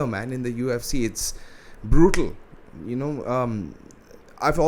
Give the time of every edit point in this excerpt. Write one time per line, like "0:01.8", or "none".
none